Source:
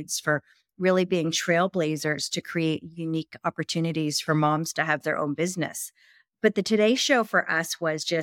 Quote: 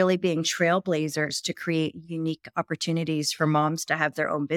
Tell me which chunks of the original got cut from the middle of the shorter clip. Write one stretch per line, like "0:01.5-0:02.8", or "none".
none